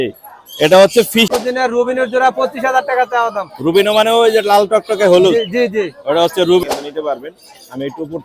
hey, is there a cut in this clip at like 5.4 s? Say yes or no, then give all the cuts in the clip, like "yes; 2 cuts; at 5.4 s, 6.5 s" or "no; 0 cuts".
no; 2 cuts; at 1.3 s, 6.6 s